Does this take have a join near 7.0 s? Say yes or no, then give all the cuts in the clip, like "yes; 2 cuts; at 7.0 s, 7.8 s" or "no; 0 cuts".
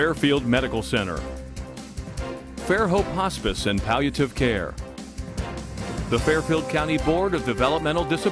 no; 1 cut; at 4.8 s